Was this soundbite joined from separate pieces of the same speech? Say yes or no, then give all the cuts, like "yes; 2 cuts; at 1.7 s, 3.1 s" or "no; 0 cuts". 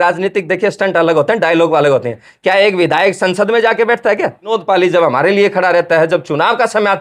yes; 1 cut; at 4.5 s